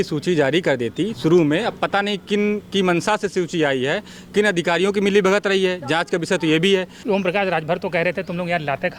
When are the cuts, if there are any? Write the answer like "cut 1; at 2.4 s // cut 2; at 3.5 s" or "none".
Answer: cut 1; at 6.9 s

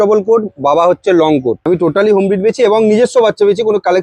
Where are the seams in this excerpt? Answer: cut 1; at 1.6 s

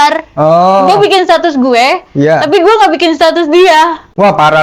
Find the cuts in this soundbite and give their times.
none

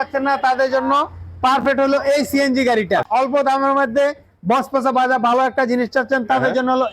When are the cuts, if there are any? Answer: cut 1; at 3.0 s

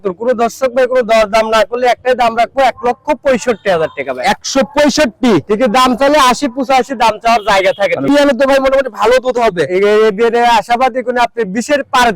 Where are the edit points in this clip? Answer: cut 1; at 8.1 s

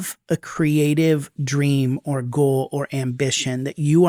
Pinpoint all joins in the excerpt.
none

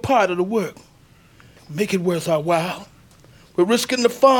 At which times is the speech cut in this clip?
cut 1; at 1.6 s

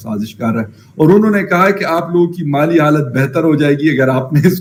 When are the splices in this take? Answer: none

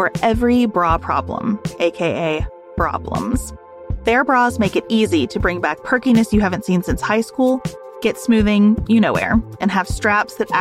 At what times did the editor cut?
none

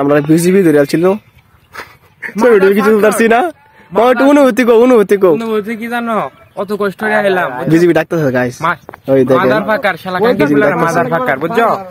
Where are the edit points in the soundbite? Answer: none

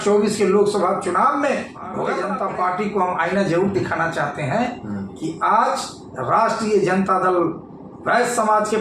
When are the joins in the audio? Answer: cut 1; at 2.1 s

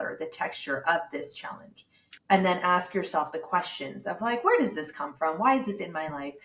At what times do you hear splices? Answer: none

